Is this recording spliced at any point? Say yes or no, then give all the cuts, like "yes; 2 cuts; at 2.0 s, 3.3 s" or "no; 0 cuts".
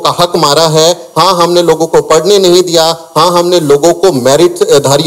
no; 0 cuts